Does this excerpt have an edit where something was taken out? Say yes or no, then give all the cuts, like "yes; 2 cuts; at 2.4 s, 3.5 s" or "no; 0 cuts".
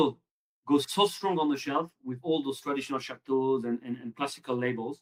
no; 0 cuts